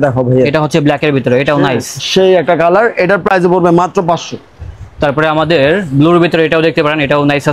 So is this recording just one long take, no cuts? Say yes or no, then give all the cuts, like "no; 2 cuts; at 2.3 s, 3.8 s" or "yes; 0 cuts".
yes; 0 cuts